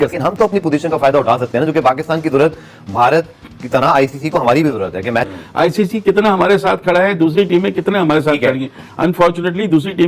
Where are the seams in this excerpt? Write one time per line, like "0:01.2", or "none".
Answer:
0:05.4